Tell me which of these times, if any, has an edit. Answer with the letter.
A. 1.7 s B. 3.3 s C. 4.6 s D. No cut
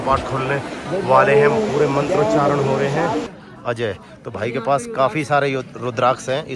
B